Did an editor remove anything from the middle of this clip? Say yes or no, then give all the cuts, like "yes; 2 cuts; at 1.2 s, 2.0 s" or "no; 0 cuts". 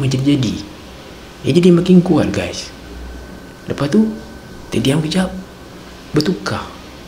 no; 0 cuts